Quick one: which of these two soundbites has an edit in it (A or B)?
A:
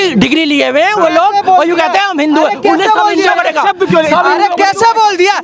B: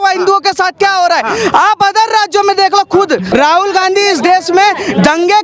B